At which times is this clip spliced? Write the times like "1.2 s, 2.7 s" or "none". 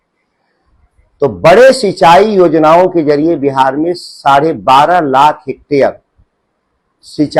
none

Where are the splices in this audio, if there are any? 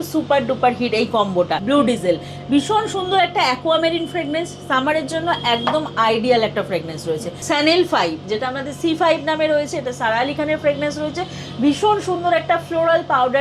1.6 s, 7.3 s

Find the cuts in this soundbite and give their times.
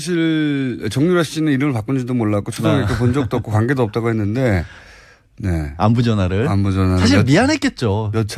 none

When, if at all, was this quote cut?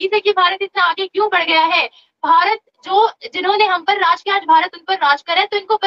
none

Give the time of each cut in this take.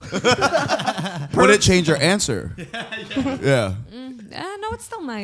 1.3 s

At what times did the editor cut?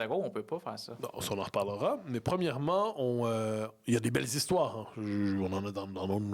none

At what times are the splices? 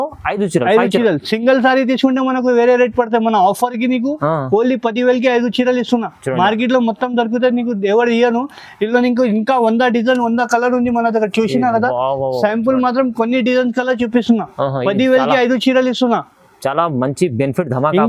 none

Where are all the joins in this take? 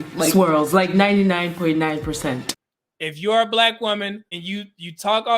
2.5 s, 4.3 s

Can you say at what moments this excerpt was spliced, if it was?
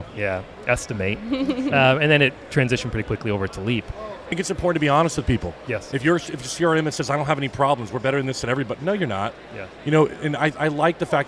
4.3 s

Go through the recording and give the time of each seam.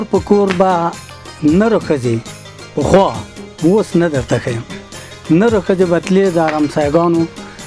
none

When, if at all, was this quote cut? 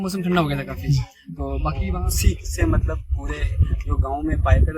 1.9 s

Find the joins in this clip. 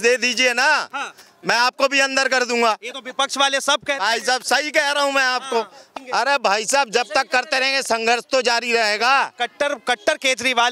5.8 s

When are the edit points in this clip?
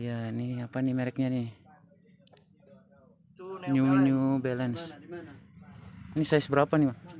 none

